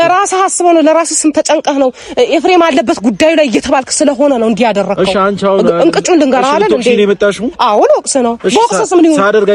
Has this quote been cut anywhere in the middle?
no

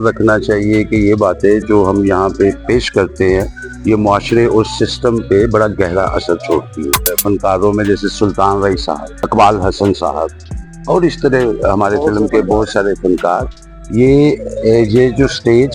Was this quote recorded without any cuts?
no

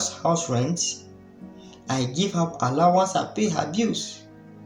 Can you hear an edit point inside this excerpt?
no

